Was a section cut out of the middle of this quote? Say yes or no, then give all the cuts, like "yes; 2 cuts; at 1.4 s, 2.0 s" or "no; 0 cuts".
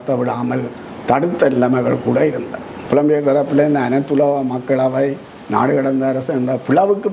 yes; 1 cut; at 2.8 s